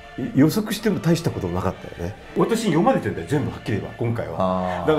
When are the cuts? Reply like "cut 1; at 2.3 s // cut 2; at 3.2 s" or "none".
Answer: cut 1; at 2.3 s